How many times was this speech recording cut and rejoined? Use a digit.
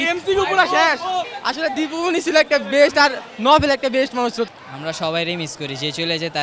2